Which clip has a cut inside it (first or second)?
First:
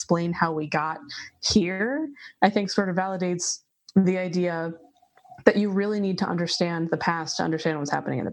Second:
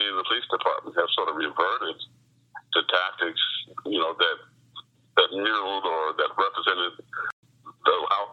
second